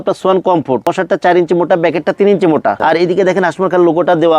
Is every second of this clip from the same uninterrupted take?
no; 2 cuts; at 0.9 s, 2.8 s

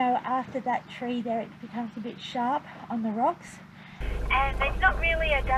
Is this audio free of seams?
yes; 0 cuts

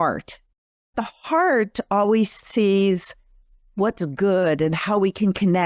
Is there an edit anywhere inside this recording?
yes; 1 cut; at 0.9 s

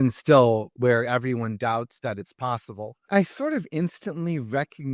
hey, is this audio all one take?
no; 1 cut; at 3.1 s

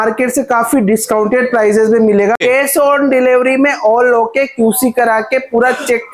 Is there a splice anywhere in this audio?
yes; 1 cut; at 2.4 s

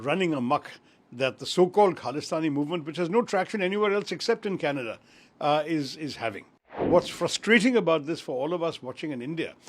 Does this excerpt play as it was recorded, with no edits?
no; 1 cut; at 6.9 s

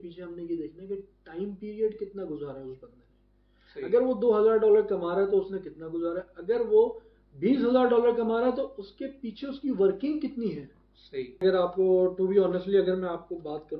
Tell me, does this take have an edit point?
yes; 1 cut; at 11.4 s

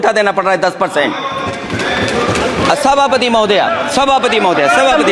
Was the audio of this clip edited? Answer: no; 0 cuts

